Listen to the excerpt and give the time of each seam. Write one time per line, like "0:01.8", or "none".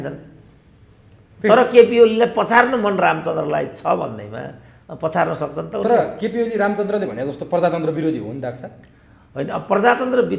none

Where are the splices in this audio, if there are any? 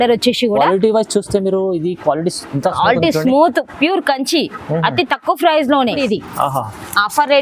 0:06.0

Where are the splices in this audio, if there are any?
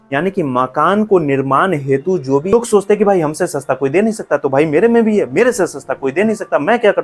0:02.5

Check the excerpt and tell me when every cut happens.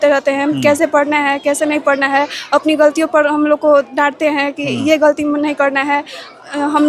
none

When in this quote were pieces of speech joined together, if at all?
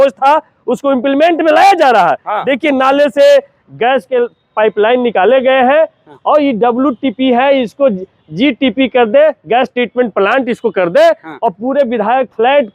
none

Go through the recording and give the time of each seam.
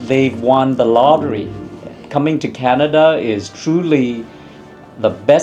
none

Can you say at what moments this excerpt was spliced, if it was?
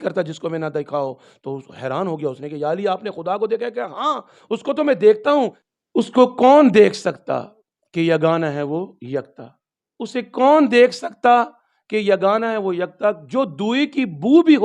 0:05.6

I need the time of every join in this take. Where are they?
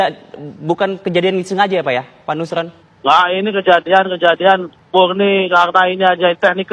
0:02.8
0:04.7

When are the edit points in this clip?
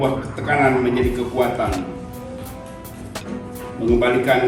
none

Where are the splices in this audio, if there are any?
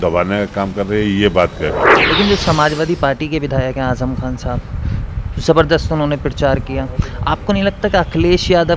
0:02.0

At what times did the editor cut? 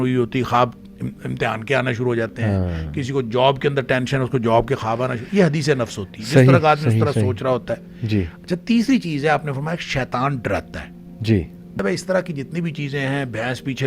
0:11.8

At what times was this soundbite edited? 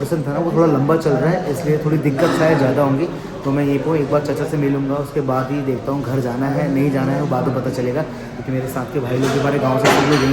none

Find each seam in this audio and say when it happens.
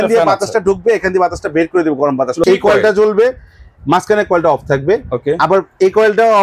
0:02.4

